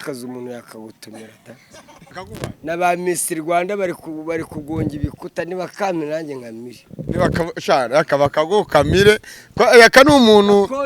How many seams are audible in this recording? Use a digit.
1